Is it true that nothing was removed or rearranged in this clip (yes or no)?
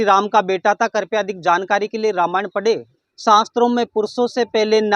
no